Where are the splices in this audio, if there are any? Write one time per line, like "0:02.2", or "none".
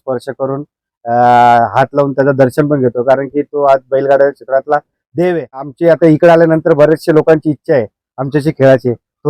0:05.7